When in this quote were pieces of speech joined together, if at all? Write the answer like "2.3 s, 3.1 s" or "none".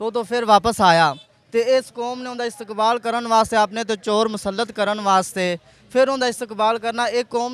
none

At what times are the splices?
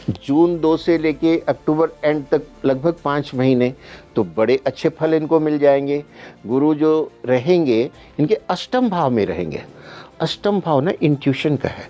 none

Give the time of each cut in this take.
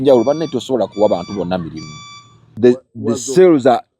2.4 s

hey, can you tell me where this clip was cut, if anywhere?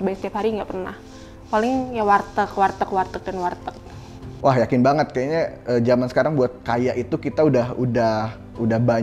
4.3 s

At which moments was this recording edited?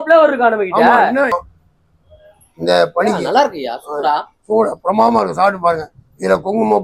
1.3 s

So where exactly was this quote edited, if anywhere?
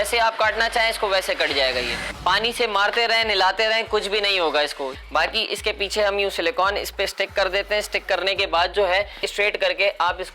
2.0 s, 4.9 s, 9.2 s

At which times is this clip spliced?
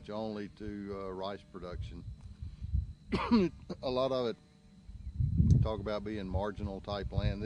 3.7 s

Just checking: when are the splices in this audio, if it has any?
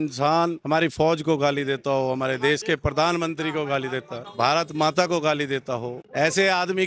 4.2 s

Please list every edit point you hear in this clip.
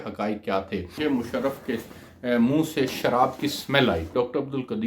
1.0 s, 4.1 s

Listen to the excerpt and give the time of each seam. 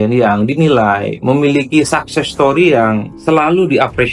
3.1 s

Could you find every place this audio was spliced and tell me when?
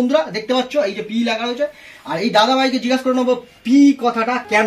none

